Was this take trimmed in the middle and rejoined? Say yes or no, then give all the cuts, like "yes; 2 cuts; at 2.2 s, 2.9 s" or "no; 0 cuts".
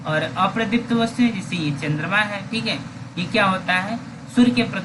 no; 0 cuts